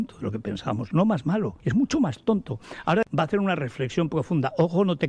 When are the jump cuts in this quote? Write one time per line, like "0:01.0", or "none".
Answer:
0:01.6
0:03.1